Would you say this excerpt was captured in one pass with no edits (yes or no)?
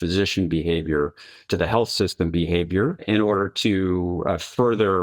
no